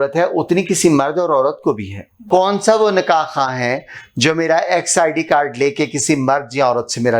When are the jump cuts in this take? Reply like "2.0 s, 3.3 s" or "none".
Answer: 2.2 s